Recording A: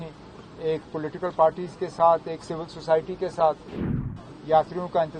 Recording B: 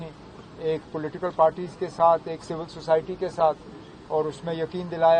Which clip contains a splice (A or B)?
A